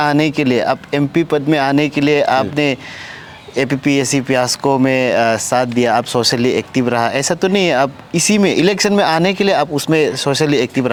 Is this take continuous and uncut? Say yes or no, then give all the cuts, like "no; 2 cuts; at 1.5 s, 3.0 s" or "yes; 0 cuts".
yes; 0 cuts